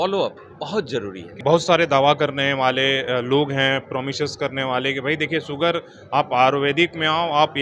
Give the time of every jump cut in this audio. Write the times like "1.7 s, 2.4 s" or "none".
1.2 s